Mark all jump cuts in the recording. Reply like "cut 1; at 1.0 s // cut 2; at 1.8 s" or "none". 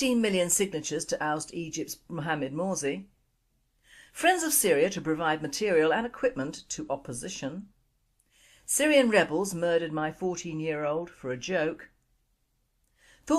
cut 1; at 1.6 s